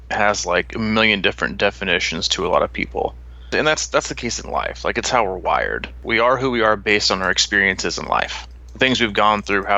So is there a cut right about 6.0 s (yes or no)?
yes